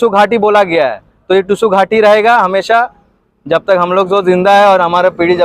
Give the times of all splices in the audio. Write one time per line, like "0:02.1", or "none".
none